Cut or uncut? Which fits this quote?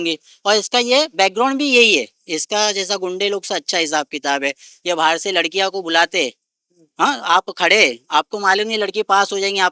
uncut